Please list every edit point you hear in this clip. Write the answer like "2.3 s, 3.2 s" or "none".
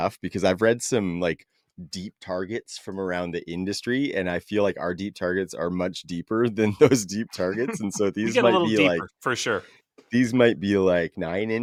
none